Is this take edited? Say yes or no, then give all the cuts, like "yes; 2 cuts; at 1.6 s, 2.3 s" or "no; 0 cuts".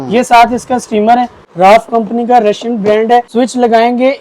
yes; 2 cuts; at 1.4 s, 3.3 s